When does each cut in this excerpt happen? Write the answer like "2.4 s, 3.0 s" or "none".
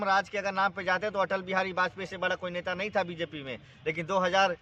none